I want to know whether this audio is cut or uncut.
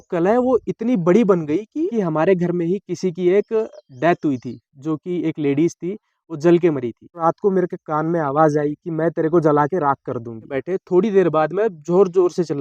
cut